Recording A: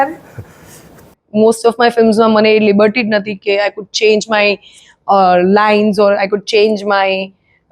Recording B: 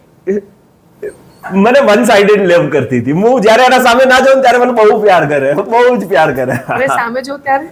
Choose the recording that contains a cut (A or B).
A